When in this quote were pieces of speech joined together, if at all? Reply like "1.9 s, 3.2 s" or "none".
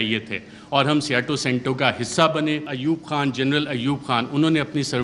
2.7 s